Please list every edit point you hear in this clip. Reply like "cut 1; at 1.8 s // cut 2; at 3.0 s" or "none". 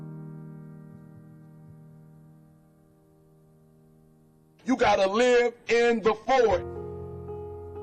cut 1; at 5.6 s